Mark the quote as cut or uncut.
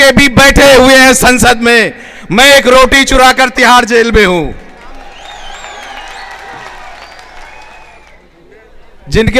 cut